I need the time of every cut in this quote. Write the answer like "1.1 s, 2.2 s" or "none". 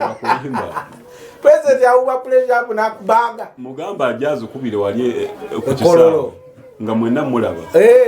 none